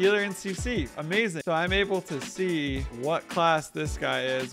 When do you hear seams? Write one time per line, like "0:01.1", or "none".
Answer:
0:01.4
0:02.9